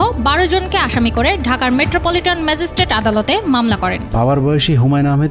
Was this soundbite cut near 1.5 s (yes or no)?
no